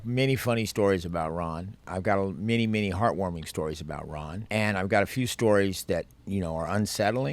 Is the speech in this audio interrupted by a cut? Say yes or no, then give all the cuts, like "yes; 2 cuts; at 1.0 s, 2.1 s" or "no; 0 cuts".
yes; 3 cuts; at 1.8 s, 4.3 s, 6.2 s